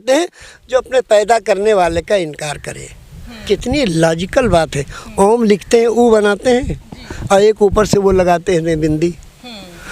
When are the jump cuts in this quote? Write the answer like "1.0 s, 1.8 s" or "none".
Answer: 3.4 s